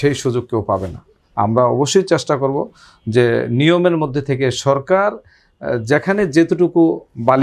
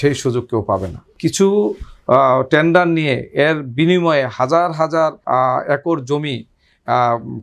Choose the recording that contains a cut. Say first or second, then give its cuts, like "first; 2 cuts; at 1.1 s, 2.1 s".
second; 2 cuts; at 1.1 s, 5.2 s